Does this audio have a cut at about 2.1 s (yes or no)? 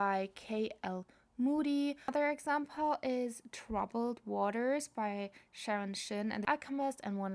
yes